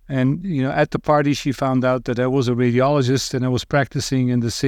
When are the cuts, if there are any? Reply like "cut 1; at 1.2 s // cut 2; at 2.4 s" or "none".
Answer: none